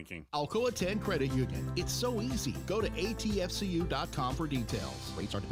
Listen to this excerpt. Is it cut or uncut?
uncut